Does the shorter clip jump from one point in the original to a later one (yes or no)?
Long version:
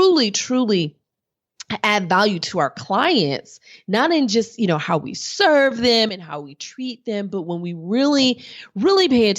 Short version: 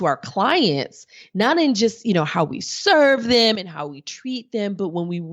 no